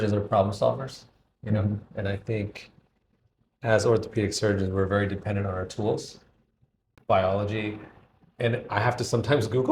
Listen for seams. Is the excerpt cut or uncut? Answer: cut